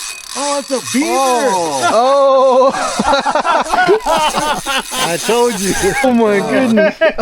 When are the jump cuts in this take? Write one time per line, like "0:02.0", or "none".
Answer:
0:06.0